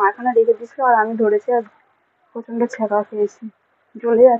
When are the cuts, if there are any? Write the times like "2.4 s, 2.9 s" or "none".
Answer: none